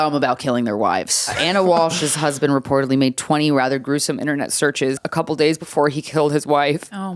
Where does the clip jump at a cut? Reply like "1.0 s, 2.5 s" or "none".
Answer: 1.4 s, 5.0 s